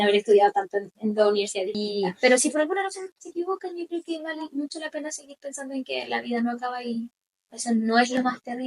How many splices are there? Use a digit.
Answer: 1